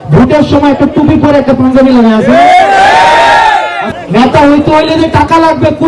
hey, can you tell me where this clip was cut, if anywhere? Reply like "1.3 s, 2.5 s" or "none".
3.9 s